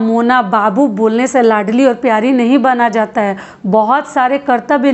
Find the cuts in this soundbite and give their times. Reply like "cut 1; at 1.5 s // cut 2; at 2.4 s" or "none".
none